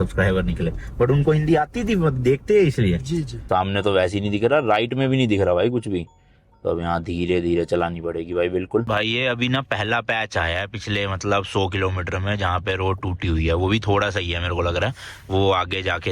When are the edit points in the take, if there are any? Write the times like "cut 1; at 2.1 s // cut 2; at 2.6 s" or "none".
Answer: cut 1; at 3.4 s // cut 2; at 8.8 s